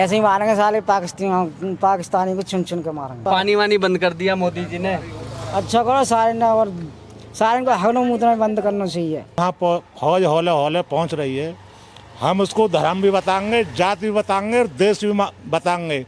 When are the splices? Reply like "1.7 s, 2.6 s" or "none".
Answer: 3.2 s, 9.3 s